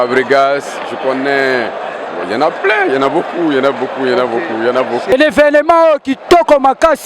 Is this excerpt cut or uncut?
cut